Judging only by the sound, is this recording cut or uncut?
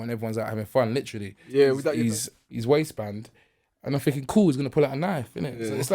cut